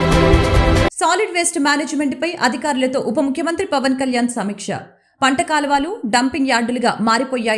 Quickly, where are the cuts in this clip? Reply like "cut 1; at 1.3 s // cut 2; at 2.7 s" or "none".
cut 1; at 0.9 s